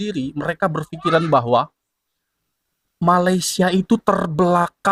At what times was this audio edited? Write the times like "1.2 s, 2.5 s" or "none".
none